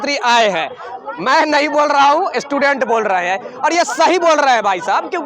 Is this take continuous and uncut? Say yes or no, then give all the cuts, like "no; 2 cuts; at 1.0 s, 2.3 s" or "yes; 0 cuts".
yes; 0 cuts